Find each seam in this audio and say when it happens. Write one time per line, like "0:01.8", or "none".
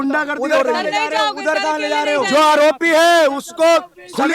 none